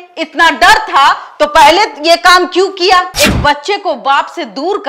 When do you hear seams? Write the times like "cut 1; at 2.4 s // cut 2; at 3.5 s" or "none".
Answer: cut 1; at 3.1 s